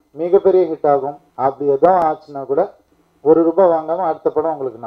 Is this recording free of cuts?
no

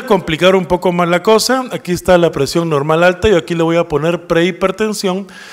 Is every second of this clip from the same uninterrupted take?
no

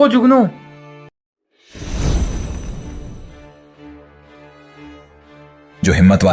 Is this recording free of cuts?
yes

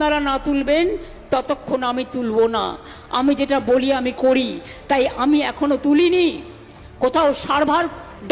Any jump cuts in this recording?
no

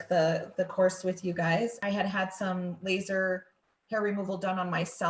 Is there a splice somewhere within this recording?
yes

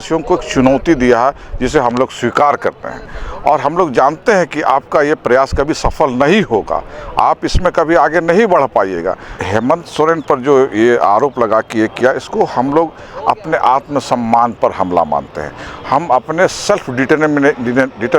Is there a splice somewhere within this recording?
yes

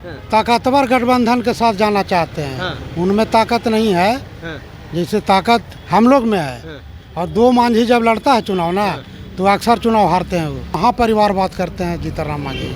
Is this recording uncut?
no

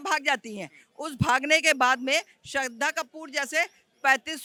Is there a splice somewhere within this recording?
no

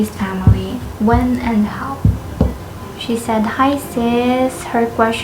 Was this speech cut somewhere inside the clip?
yes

